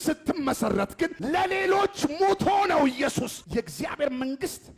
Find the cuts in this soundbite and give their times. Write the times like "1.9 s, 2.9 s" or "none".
1.2 s, 3.3 s